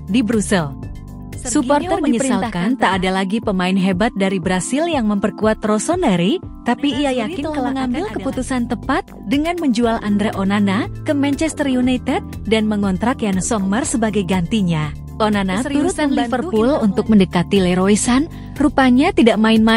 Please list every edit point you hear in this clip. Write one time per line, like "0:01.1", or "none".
0:02.4
0:07.5
0:16.2